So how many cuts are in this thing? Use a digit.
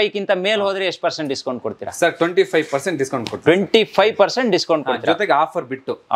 0